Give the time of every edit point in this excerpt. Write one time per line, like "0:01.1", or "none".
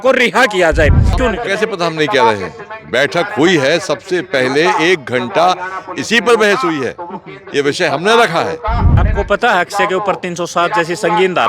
0:01.2
0:09.0